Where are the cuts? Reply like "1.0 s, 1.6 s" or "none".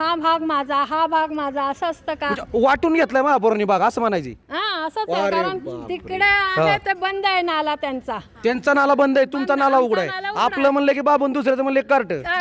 none